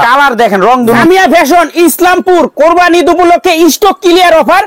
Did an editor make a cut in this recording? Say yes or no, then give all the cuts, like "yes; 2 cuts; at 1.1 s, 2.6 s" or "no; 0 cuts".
yes; 1 cut; at 1.0 s